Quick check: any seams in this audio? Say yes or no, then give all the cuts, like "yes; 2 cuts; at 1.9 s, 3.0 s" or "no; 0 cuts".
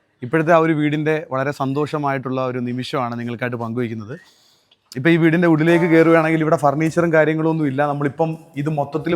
no; 0 cuts